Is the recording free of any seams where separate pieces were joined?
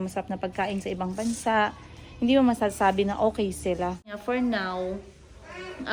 no; 1 cut; at 4.2 s

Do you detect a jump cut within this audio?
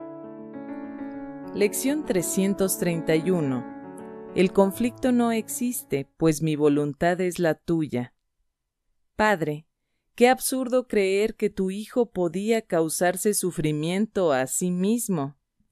yes; 1 cut; at 1.5 s

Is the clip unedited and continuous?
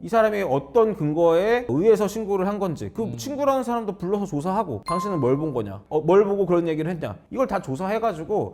yes; 0 cuts

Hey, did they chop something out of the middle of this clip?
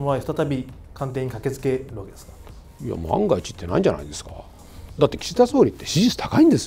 no; 0 cuts

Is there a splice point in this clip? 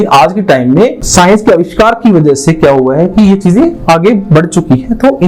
yes; 1 cut; at 1.0 s

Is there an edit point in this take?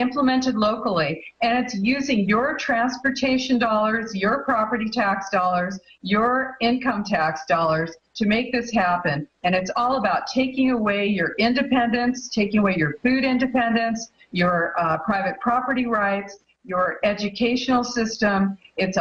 no; 0 cuts

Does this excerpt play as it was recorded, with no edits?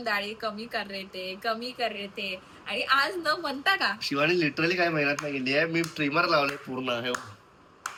yes; 0 cuts

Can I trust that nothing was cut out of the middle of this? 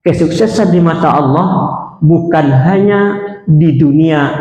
yes; 0 cuts

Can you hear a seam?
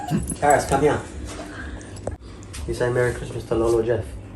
yes; 1 cut; at 2.1 s

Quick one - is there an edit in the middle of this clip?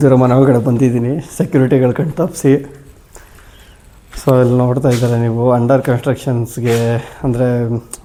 no; 0 cuts

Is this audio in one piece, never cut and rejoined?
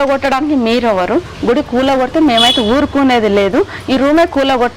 yes; 0 cuts

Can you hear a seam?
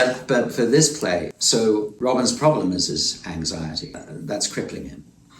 yes; 3 cuts; at 1.3 s, 1.9 s, 4.0 s

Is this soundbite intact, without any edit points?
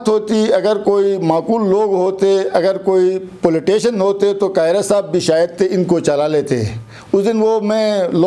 yes; 0 cuts

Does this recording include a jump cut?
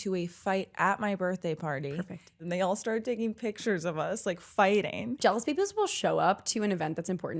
yes; 2 cuts; at 2.4 s, 5.2 s

